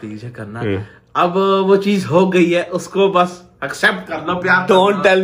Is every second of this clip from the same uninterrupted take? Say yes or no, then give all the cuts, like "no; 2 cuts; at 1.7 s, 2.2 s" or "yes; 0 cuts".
yes; 0 cuts